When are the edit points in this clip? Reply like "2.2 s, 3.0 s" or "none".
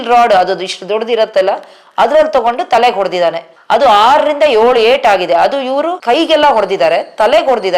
6.0 s